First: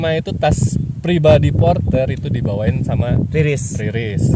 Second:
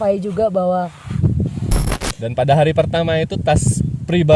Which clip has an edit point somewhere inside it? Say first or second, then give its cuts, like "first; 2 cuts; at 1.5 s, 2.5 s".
second; 1 cut; at 1.7 s